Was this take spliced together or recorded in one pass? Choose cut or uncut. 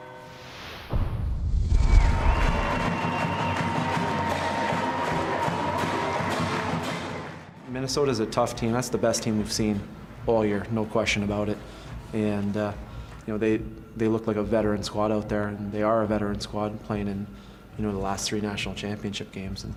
uncut